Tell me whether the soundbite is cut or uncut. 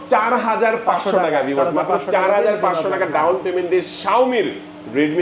uncut